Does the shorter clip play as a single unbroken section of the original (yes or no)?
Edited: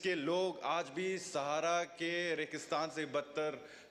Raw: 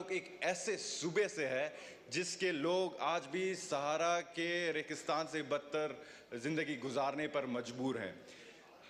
yes